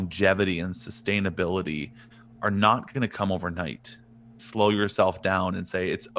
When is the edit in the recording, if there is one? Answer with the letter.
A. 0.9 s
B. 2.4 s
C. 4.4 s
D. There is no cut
C